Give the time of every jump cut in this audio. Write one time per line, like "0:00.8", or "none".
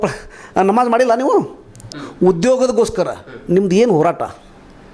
0:02.0